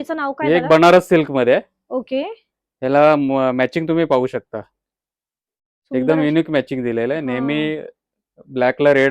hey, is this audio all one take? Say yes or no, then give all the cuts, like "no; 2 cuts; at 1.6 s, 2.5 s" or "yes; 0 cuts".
yes; 0 cuts